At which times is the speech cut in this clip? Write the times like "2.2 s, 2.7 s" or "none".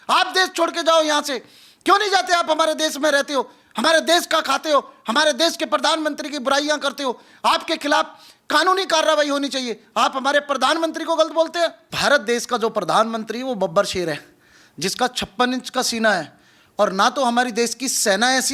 11.9 s